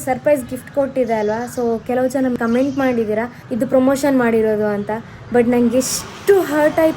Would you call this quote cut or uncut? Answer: cut